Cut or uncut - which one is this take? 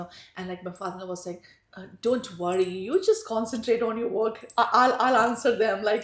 uncut